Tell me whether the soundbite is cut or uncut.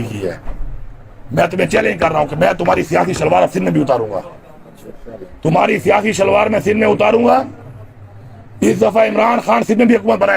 uncut